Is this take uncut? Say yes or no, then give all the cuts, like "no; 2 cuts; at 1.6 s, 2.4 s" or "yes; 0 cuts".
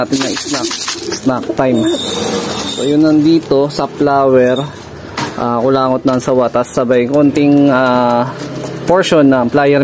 yes; 0 cuts